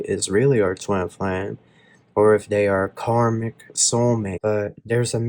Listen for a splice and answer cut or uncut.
cut